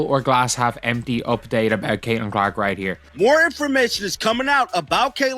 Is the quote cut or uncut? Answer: uncut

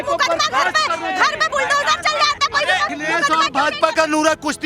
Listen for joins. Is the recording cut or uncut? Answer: cut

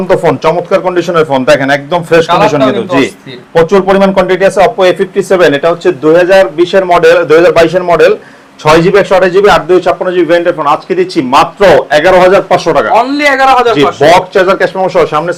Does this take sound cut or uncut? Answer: uncut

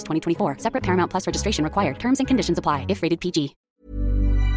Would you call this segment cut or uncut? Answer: cut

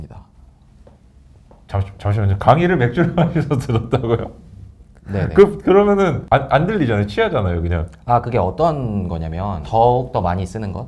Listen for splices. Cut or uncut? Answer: cut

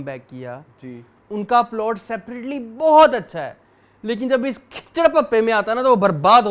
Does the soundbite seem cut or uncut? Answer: uncut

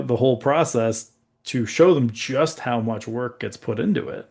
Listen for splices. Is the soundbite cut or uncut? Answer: uncut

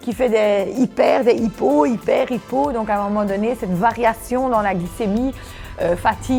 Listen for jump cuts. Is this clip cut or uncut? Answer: uncut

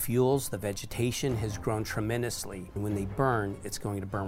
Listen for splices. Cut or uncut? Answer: cut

